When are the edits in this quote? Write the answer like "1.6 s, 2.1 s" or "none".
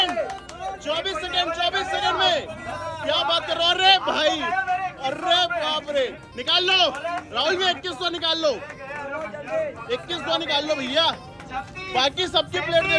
none